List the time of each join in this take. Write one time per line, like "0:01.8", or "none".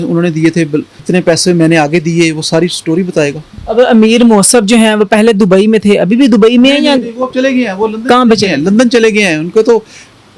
0:00.9
0:03.5